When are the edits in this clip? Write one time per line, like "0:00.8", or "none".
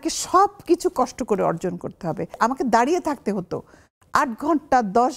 0:02.4